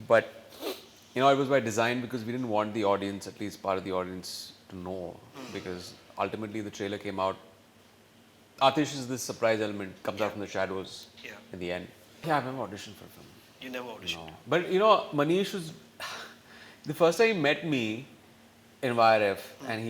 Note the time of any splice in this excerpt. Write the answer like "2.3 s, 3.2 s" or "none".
12.2 s